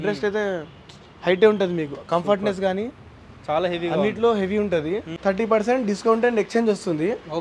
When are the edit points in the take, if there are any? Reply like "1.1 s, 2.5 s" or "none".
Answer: 5.1 s